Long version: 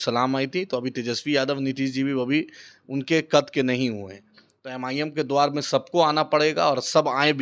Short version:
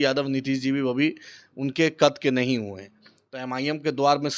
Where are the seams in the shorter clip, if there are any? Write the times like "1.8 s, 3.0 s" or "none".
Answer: none